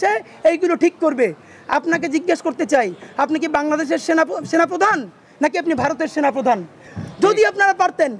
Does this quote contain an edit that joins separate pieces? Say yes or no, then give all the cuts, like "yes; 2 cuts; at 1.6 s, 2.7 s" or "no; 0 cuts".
yes; 1 cut; at 6.9 s